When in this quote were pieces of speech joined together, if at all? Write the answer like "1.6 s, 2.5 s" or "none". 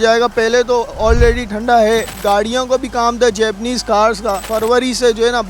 2.1 s, 4.4 s